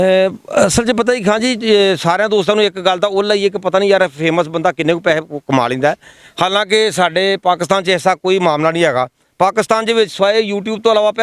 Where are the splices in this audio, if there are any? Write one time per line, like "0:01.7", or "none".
none